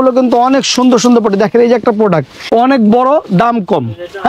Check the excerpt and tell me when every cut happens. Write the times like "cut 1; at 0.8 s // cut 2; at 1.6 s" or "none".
none